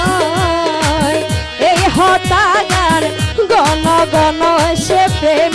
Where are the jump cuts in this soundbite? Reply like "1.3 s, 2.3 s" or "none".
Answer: none